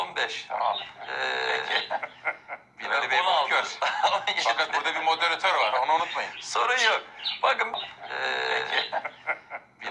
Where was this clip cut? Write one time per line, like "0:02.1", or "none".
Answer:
0:07.7